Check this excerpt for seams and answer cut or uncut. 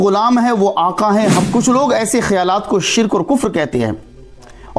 cut